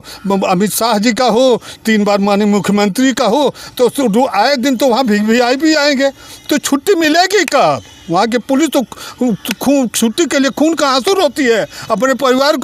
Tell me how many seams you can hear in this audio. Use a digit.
0